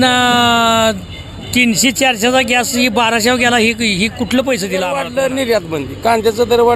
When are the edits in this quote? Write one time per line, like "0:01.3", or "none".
0:05.0